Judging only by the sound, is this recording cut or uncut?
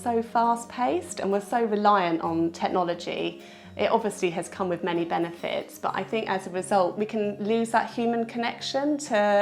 cut